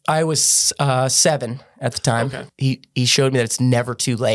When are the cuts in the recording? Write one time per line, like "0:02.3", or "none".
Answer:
0:02.5